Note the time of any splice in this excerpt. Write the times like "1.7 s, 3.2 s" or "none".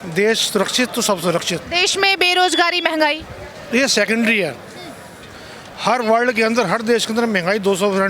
none